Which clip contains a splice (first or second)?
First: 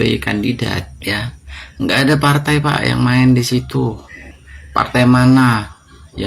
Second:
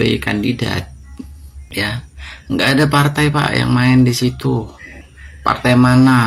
first